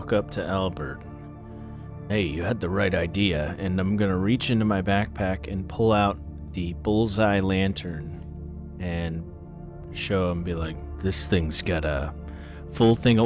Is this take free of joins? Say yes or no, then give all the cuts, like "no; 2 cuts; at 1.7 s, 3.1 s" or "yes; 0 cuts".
yes; 0 cuts